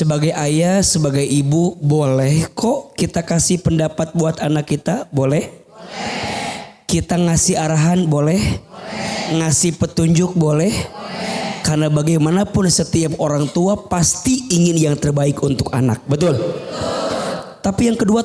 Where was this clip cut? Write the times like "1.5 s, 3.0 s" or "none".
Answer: none